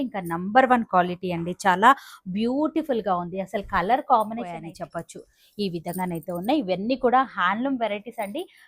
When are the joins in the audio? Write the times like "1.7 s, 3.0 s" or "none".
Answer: 4.7 s